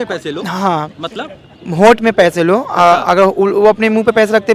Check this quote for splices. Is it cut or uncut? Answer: uncut